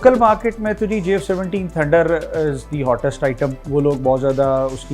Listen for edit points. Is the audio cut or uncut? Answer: cut